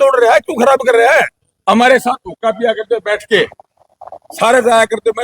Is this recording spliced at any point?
yes; 1 cut; at 1.4 s

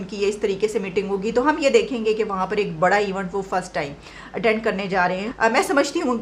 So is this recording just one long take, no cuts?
no; 1 cut; at 5.3 s

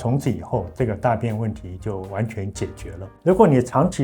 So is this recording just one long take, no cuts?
no; 1 cut; at 3.0 s

